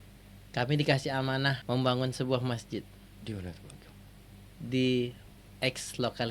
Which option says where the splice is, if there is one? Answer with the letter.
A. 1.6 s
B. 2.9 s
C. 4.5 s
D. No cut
A